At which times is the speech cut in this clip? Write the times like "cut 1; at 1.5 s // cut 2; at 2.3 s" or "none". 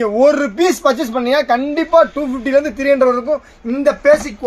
none